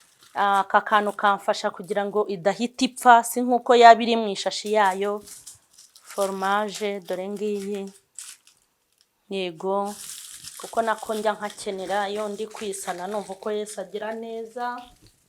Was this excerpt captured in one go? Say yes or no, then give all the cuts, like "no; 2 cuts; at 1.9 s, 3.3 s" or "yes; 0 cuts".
yes; 0 cuts